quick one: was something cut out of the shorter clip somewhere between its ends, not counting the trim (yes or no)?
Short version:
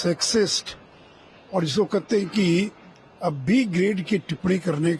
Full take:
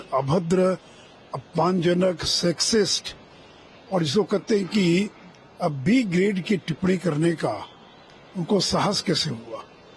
no